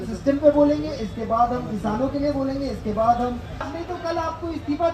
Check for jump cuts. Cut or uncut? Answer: cut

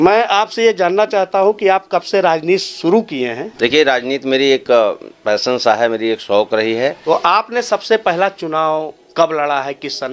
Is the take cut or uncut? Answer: cut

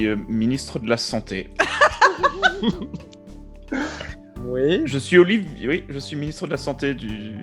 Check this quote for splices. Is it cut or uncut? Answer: uncut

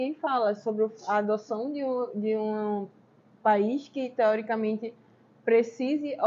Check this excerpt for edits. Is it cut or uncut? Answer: uncut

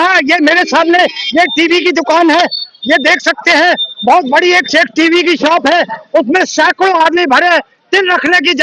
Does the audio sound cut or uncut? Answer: uncut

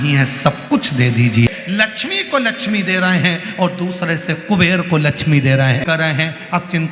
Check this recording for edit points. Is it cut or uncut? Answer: cut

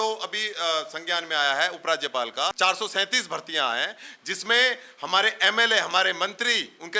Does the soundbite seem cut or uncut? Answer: cut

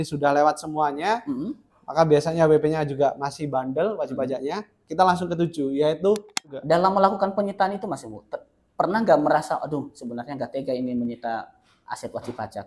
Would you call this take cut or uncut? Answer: cut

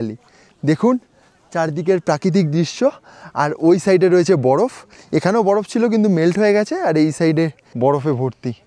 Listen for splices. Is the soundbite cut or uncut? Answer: cut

